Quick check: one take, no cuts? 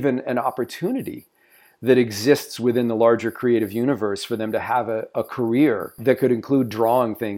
no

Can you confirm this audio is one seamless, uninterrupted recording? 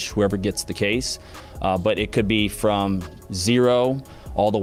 yes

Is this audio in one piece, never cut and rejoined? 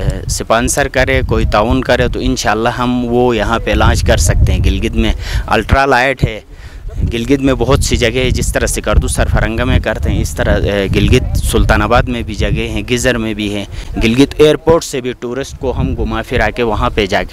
yes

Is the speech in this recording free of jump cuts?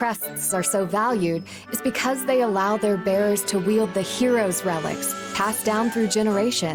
yes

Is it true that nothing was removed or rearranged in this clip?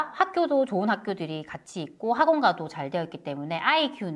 yes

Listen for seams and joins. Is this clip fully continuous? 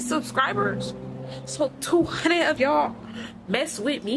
yes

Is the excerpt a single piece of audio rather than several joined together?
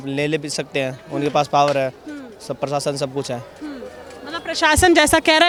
yes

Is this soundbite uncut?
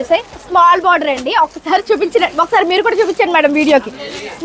yes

